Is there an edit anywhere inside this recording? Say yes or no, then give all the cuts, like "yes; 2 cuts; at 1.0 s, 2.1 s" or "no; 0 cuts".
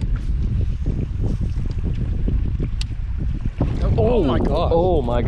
no; 0 cuts